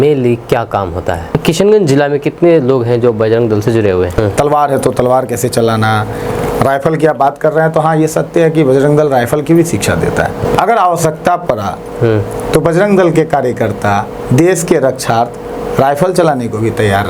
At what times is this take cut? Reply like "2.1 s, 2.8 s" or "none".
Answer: 1.4 s, 4.1 s, 10.4 s